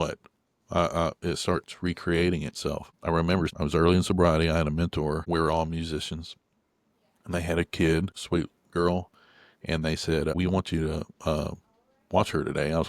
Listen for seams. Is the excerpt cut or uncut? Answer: cut